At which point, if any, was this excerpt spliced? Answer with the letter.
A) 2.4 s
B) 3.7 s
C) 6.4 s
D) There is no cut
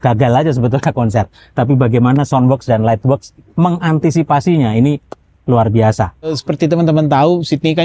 C